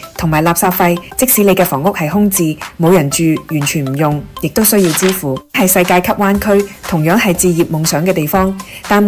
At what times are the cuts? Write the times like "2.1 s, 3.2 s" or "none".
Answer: 1.1 s, 5.6 s